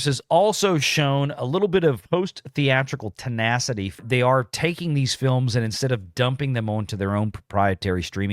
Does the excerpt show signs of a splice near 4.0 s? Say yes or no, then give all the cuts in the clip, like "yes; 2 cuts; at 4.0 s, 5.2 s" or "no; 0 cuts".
yes; 2 cuts; at 2.0 s, 4.0 s